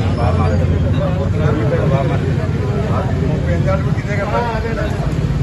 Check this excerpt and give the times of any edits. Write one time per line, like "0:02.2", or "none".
0:02.3